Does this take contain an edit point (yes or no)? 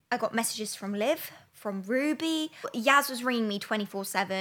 yes